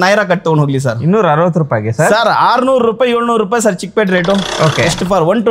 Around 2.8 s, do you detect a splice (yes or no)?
no